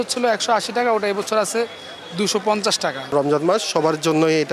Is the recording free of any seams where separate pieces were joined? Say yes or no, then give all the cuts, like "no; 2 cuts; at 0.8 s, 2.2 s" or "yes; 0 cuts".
no; 1 cut; at 3.0 s